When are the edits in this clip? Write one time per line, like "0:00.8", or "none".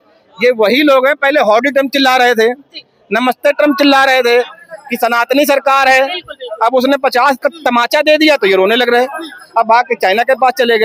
none